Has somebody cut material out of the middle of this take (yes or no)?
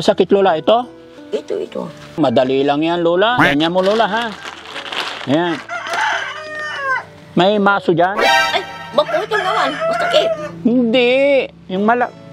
yes